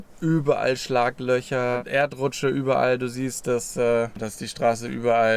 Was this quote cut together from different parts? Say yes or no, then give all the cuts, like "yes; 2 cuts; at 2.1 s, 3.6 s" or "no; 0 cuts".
yes; 2 cuts; at 1.8 s, 4.3 s